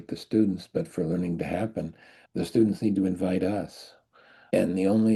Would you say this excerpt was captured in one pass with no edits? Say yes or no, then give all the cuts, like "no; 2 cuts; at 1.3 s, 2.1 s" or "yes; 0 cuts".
yes; 0 cuts